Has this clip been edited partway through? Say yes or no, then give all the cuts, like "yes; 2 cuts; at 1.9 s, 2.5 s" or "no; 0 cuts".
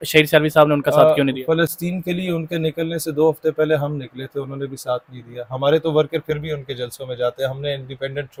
no; 0 cuts